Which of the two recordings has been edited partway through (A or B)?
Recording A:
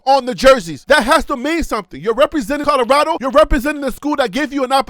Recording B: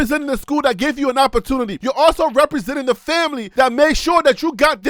A